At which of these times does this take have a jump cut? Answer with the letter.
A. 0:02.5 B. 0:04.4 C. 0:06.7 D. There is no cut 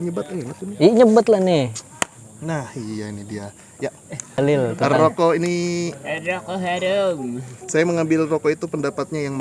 B